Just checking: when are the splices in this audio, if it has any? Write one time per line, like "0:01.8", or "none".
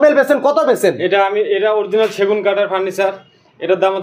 none